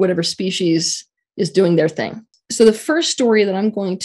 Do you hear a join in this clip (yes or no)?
yes